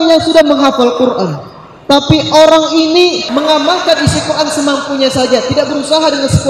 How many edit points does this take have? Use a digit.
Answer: 1